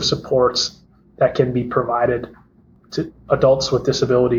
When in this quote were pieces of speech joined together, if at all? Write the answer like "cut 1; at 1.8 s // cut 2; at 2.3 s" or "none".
none

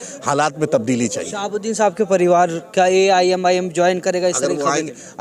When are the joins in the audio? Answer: none

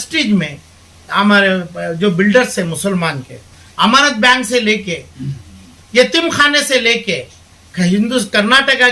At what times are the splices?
none

